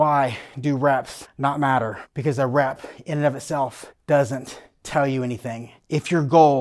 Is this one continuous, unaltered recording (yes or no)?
no